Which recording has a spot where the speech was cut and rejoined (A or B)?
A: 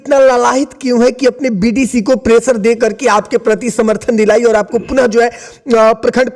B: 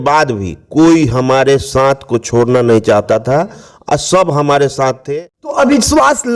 B